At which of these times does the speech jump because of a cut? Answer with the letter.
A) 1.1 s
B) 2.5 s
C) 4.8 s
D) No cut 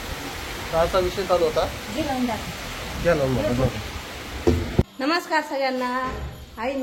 C